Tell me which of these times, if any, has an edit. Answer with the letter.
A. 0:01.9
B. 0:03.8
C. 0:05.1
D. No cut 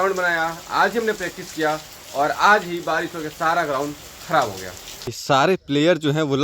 C